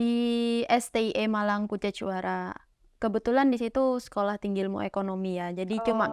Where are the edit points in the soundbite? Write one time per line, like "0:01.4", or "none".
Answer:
none